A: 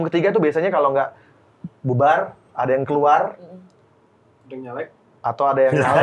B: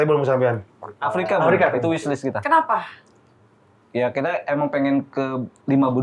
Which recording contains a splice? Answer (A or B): B